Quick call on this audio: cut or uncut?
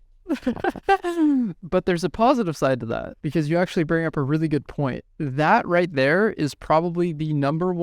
cut